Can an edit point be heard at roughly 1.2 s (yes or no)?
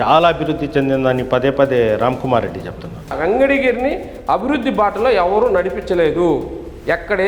no